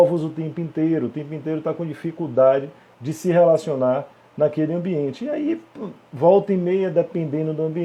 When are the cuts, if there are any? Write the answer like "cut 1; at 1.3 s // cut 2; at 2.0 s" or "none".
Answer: none